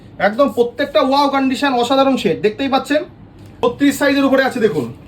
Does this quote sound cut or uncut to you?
cut